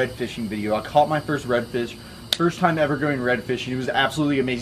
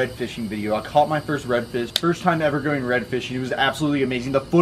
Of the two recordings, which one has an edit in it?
second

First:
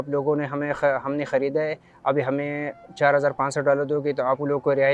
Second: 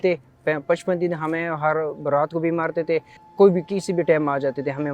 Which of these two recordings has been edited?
second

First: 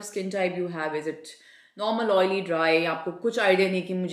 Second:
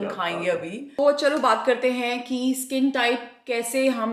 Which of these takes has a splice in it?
second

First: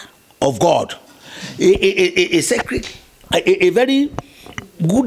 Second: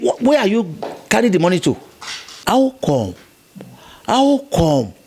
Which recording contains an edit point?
second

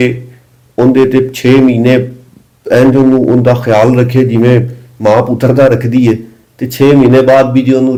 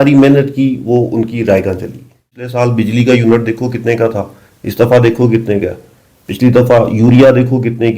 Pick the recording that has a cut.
second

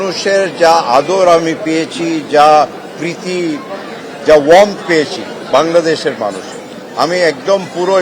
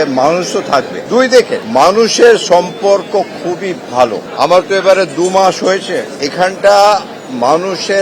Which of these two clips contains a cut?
second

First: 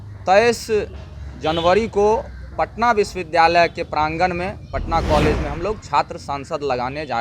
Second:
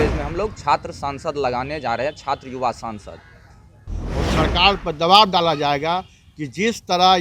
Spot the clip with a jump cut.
second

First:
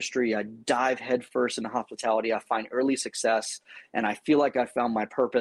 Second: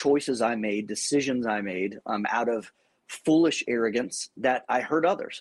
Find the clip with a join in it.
second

